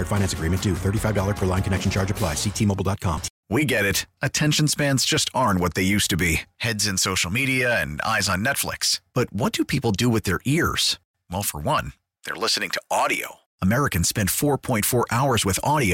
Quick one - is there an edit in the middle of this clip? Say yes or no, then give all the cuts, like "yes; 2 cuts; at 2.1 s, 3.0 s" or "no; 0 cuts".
yes; 1 cut; at 3.3 s